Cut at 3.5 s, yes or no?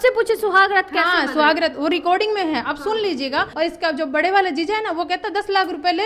yes